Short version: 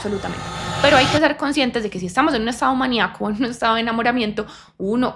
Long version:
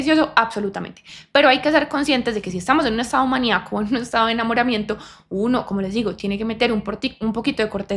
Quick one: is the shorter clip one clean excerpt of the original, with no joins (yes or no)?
yes